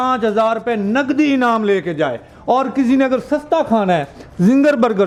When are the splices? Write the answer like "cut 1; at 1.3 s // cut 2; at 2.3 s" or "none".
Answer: none

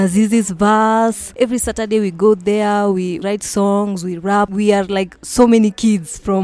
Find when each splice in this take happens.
cut 1; at 1.2 s // cut 2; at 3.2 s // cut 3; at 4.5 s

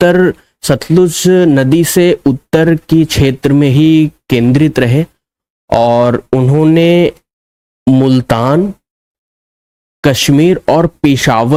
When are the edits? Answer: none

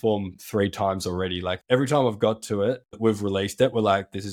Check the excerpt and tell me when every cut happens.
cut 1; at 1.6 s // cut 2; at 3.0 s

